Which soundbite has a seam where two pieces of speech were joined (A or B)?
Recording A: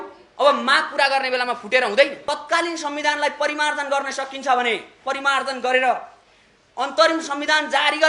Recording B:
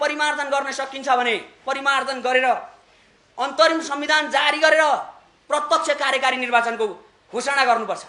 A